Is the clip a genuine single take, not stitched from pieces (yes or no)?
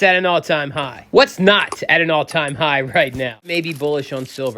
no